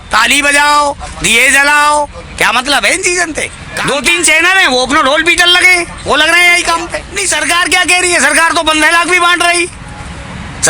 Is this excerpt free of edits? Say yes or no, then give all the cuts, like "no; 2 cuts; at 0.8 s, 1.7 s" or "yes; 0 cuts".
no; 2 cuts; at 3.6 s, 7.1 s